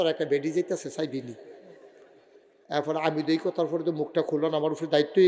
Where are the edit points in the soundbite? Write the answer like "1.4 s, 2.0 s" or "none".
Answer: none